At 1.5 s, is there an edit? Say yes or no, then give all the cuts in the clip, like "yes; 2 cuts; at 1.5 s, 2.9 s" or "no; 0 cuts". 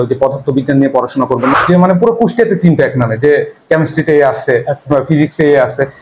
yes; 1 cut; at 1.5 s